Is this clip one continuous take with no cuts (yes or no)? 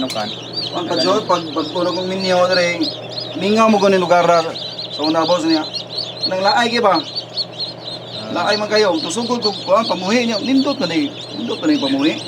yes